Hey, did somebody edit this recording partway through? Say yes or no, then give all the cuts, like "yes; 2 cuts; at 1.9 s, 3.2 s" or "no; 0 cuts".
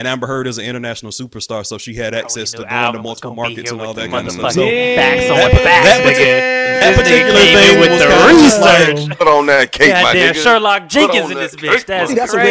no; 0 cuts